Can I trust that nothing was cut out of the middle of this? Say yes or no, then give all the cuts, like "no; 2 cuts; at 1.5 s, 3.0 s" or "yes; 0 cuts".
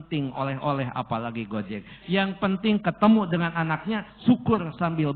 no; 1 cut; at 3.6 s